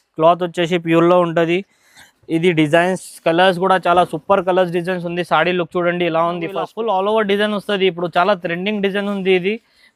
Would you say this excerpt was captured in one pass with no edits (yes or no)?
no